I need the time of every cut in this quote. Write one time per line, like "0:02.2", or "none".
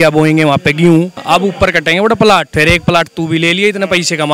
0:01.2
0:02.5